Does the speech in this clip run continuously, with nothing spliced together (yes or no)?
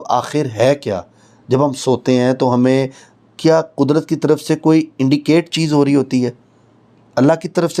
yes